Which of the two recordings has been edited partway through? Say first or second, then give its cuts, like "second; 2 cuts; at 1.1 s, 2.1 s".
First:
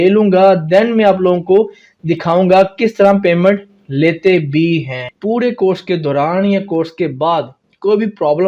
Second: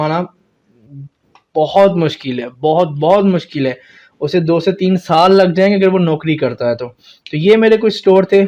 first; 1 cut; at 5.1 s